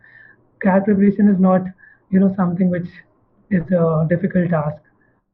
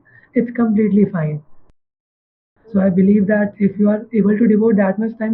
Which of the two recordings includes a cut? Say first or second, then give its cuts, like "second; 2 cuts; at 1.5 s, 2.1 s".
second; 1 cut; at 2.1 s